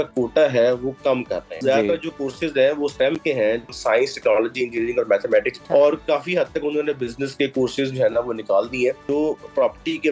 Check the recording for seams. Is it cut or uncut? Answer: cut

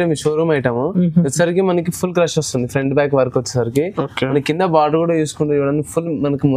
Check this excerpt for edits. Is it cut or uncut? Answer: uncut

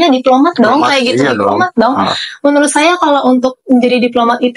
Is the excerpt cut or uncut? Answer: uncut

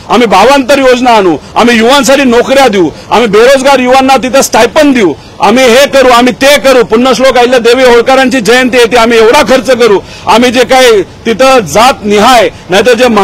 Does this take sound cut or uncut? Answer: uncut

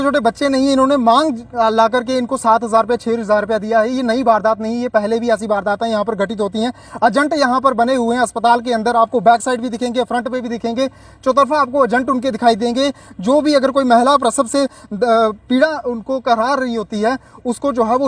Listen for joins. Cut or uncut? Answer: uncut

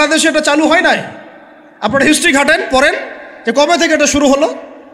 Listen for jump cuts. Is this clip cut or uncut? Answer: uncut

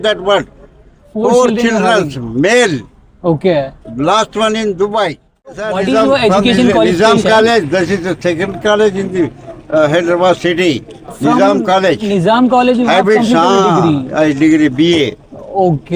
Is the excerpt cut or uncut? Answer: cut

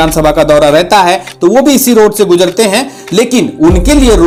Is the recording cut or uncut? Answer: uncut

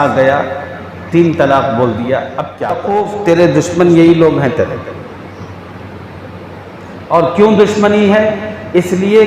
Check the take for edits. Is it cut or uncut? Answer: cut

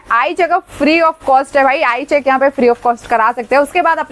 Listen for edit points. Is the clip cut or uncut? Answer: uncut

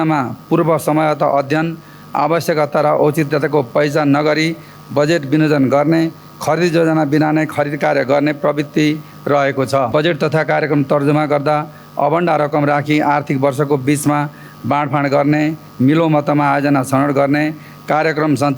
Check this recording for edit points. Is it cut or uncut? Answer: cut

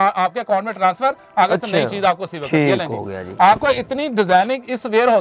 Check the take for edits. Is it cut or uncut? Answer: uncut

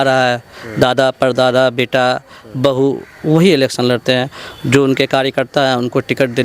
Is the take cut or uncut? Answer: uncut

